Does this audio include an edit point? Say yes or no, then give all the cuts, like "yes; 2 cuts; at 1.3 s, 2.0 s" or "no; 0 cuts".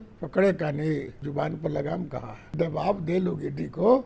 yes; 2 cuts; at 1.2 s, 2.6 s